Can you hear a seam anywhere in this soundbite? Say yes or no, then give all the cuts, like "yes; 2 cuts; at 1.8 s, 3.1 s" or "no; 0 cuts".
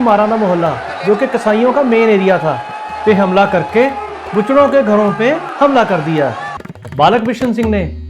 yes; 1 cut; at 6.7 s